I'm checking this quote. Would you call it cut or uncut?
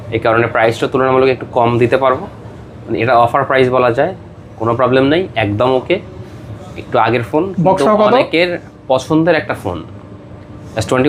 uncut